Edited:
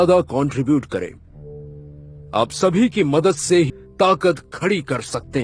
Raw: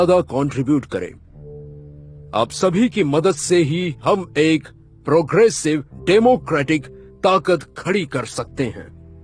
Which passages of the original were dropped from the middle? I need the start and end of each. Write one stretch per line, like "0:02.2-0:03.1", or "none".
0:03.8-0:07.0